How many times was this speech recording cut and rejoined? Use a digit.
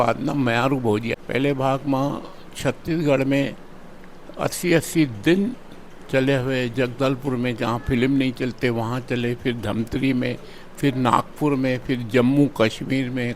1